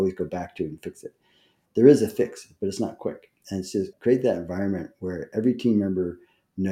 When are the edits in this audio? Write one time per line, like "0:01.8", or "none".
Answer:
0:01.6
0:03.9